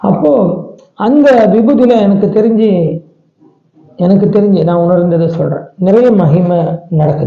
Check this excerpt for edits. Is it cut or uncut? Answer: uncut